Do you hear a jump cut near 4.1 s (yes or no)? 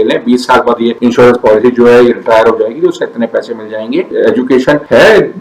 yes